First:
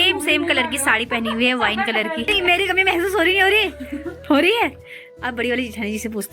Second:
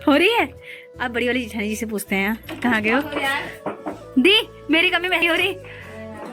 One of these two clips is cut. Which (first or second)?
first